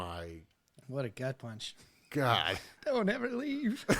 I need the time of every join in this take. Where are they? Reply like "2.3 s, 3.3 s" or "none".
2.7 s